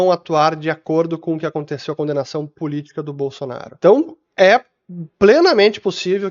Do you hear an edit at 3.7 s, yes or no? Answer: yes